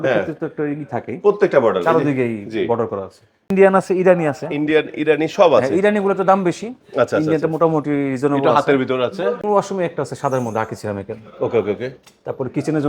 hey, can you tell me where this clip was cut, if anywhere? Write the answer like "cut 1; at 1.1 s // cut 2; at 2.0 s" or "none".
cut 1; at 3.5 s // cut 2; at 9.4 s